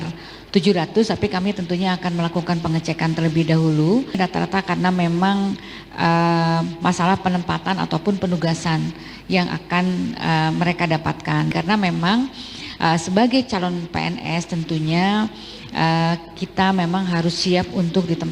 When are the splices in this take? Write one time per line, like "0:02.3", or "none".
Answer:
0:04.2
0:11.5